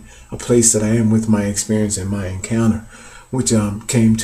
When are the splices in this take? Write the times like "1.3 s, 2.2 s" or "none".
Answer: 1.1 s